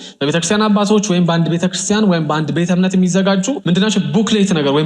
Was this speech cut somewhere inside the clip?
yes; 1 cut; at 3.6 s

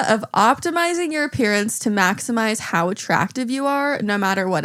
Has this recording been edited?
no; 0 cuts

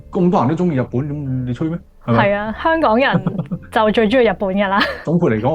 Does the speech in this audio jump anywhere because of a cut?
no; 0 cuts

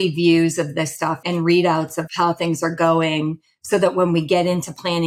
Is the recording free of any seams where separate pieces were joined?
no; 2 cuts; at 1.2 s, 2.1 s

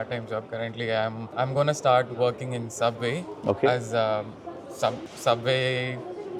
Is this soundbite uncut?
yes; 0 cuts

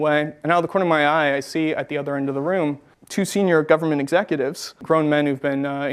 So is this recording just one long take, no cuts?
no; 1 cut; at 4.8 s

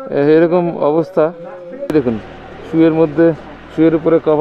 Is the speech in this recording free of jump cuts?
no; 1 cut; at 1.9 s

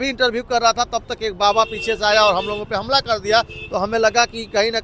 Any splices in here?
no; 0 cuts

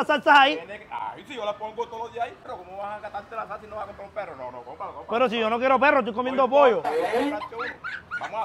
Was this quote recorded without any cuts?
yes; 0 cuts

